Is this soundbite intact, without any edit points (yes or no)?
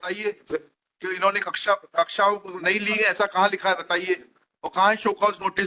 yes